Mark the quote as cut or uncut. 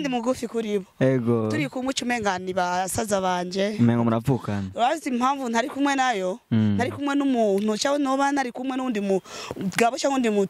uncut